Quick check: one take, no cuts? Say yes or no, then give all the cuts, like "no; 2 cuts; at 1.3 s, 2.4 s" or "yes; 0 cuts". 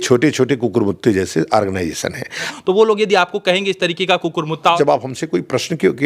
no; 2 cuts; at 2.5 s, 4.8 s